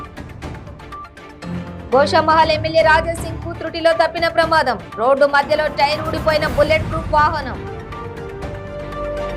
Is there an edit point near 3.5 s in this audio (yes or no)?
no